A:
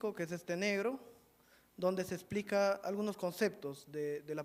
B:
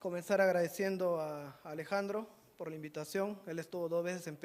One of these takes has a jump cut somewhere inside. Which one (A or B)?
B